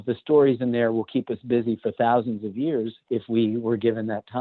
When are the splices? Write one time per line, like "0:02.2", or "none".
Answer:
0:03.1